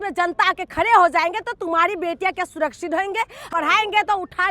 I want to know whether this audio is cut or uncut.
cut